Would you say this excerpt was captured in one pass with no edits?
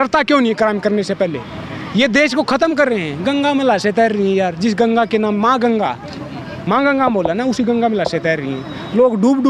yes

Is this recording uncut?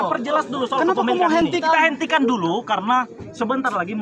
no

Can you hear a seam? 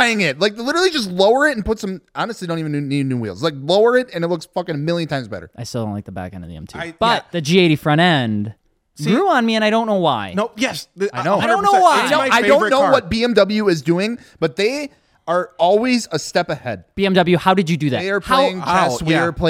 no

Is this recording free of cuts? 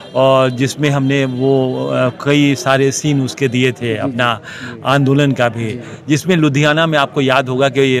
yes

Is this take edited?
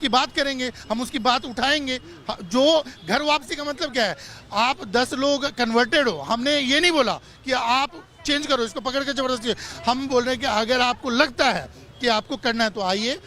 no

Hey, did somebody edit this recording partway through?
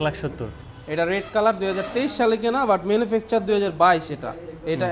no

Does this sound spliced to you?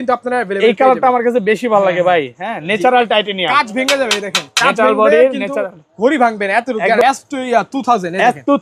yes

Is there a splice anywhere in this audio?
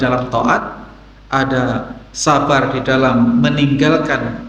no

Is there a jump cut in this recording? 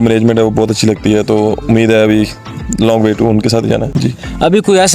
yes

